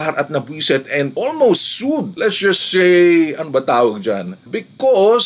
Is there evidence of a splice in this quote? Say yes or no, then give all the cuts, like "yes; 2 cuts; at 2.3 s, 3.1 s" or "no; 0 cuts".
yes; 1 cut; at 4.3 s